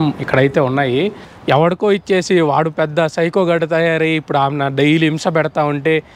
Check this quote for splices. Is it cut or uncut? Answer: cut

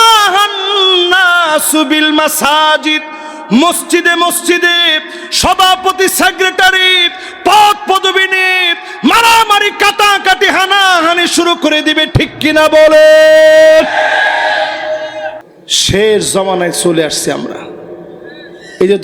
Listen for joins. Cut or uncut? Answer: cut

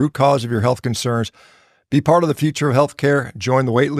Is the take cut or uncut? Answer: uncut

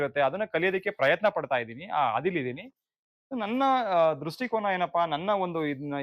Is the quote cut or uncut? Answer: uncut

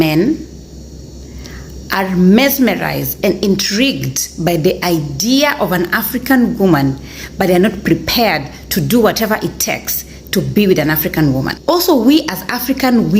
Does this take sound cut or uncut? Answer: cut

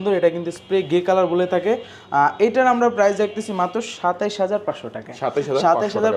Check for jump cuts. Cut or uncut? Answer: uncut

